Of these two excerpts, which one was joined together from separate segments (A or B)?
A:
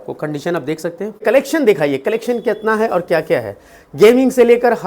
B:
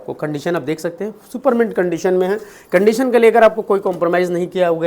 A